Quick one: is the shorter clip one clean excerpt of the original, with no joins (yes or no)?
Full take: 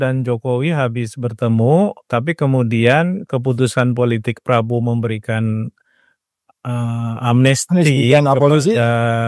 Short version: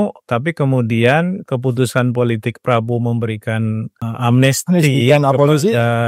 no